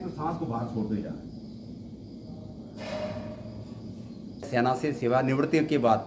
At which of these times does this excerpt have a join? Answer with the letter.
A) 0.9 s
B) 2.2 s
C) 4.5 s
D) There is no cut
C